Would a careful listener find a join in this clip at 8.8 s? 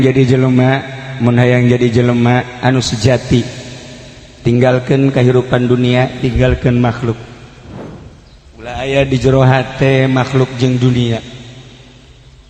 no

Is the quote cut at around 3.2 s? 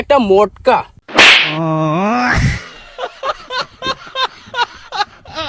no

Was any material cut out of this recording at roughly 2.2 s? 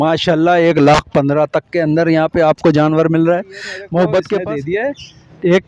no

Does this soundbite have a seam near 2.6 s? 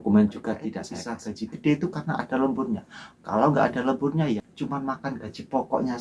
no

